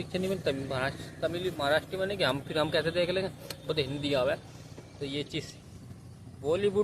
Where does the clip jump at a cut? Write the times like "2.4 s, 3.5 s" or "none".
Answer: 5.6 s